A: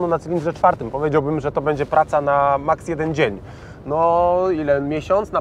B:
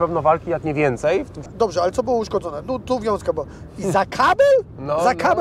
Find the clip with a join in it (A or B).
B